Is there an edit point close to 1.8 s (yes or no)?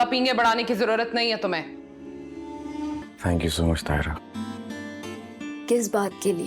no